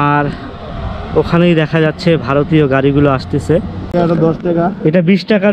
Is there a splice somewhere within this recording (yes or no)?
yes